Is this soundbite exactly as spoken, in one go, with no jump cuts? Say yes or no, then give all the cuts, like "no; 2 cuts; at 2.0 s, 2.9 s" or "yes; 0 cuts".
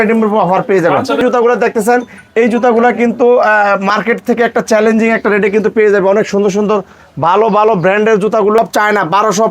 no; 2 cuts; at 1.2 s, 8.6 s